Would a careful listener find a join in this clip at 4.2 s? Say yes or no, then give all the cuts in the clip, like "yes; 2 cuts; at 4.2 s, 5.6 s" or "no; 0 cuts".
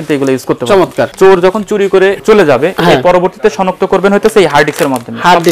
no; 2 cuts; at 1.1 s, 2.2 s